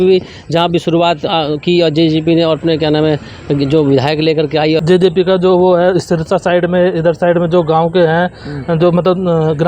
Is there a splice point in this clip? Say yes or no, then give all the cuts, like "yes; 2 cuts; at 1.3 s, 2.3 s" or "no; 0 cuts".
yes; 1 cut; at 4.8 s